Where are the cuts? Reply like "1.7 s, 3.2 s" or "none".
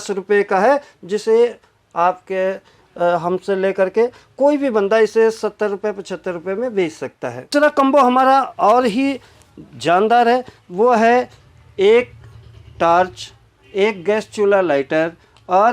7.5 s